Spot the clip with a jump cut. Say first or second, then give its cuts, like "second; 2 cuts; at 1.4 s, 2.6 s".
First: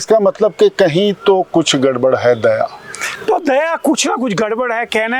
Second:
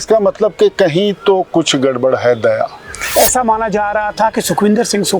second; 1 cut; at 3.0 s